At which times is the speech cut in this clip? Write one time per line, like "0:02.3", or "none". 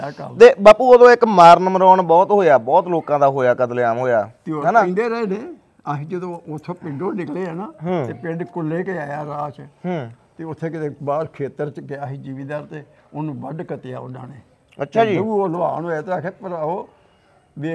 none